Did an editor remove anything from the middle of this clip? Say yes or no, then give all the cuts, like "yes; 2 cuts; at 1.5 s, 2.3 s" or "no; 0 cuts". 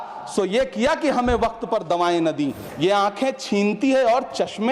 yes; 1 cut; at 2.6 s